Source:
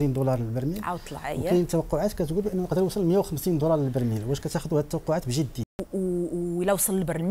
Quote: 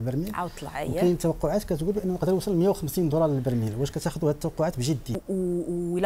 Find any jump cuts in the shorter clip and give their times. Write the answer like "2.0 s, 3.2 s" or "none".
5.1 s